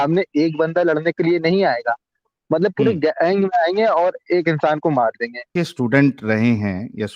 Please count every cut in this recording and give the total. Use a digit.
1